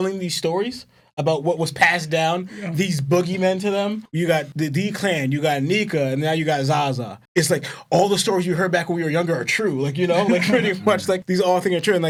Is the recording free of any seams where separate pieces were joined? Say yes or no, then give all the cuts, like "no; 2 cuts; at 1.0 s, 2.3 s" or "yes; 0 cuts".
yes; 0 cuts